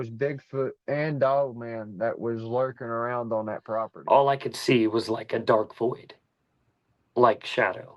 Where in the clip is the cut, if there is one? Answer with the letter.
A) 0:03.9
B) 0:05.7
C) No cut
A